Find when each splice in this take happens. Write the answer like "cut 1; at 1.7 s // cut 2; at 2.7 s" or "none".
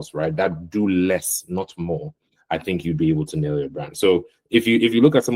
none